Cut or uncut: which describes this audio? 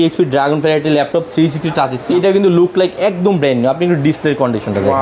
cut